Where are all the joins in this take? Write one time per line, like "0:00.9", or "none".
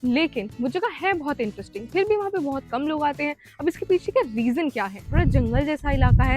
0:05.1